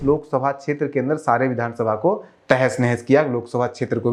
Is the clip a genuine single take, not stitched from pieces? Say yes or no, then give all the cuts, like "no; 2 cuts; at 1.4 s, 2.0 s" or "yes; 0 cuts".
yes; 0 cuts